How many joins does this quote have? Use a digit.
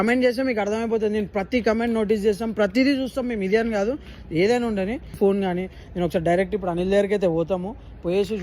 1